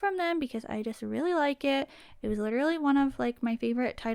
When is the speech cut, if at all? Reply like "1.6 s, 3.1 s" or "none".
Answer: none

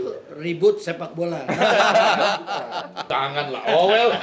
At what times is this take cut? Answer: 3.0 s

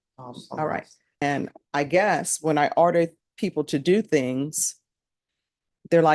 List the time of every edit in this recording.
1.2 s

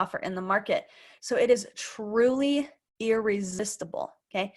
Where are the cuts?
3.6 s

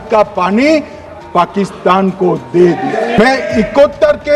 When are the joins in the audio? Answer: 3.2 s

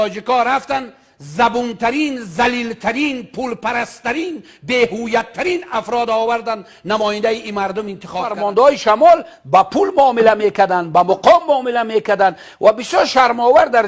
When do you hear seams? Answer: 8.4 s

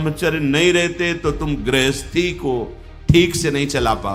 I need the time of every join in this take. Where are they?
none

